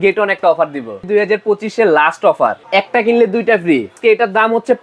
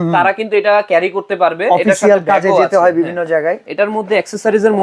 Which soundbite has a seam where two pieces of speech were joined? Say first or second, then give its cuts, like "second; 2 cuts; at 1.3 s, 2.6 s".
first; 3 cuts; at 1.1 s, 2.6 s, 3.9 s